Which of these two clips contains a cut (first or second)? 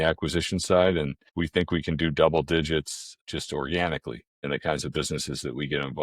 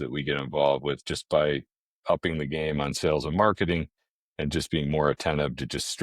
first